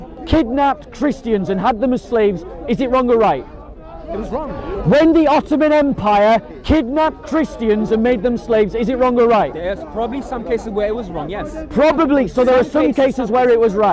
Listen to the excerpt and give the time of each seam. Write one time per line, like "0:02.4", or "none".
none